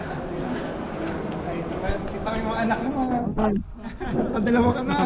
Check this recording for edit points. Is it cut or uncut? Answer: uncut